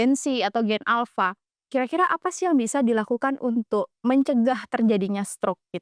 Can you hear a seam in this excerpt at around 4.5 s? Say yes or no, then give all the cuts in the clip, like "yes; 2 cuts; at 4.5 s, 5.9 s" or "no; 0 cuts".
no; 0 cuts